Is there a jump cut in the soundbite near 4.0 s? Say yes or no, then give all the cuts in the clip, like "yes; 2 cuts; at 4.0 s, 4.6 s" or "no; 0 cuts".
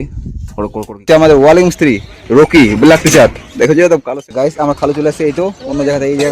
yes; 2 cuts; at 1.0 s, 4.0 s